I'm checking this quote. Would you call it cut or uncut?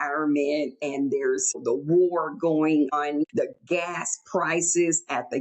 cut